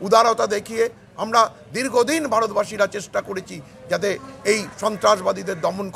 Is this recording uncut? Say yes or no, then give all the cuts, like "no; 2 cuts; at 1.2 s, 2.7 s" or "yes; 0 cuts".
yes; 0 cuts